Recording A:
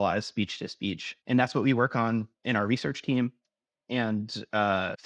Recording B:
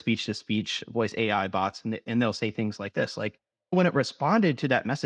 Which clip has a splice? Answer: A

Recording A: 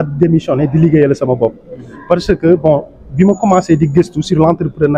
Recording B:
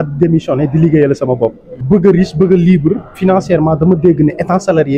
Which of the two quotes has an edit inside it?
B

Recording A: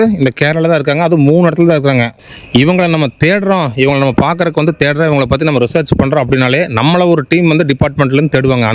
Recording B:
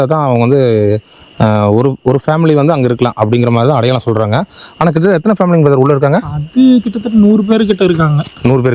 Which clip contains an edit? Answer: A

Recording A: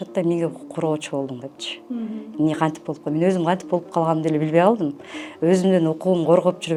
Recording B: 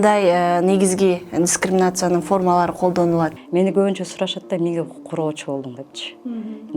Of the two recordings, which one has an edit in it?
B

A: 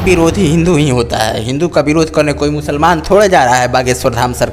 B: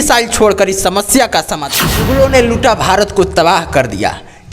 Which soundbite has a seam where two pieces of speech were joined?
B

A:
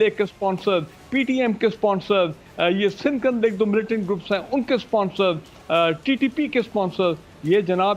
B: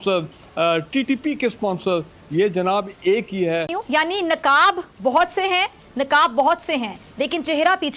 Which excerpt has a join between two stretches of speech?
B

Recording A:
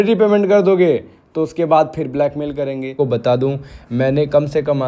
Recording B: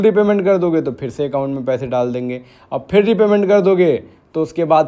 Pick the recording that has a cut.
A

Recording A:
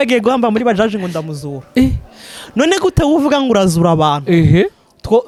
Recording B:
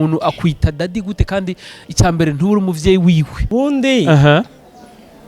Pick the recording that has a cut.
B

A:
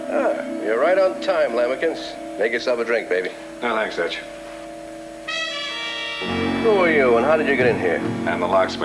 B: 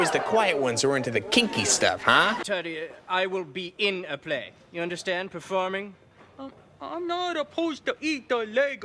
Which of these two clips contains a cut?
B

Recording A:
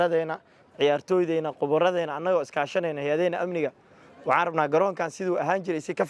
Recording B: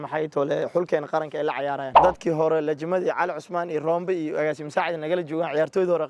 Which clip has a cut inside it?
B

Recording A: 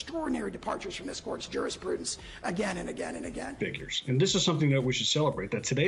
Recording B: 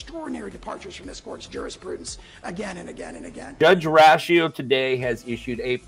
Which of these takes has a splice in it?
A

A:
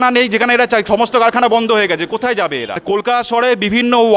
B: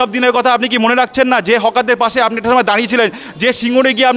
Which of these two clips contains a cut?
A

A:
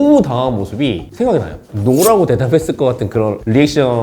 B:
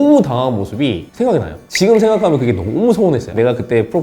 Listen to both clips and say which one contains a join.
A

